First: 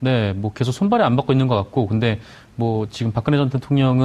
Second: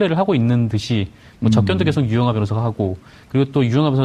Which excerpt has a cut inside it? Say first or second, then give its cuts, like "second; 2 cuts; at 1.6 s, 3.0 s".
first; 1 cut; at 1.0 s